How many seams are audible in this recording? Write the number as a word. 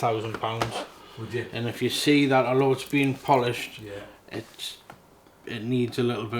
zero